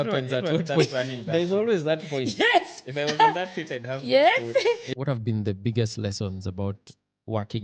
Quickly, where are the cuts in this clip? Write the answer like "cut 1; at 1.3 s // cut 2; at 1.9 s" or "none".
cut 1; at 4.9 s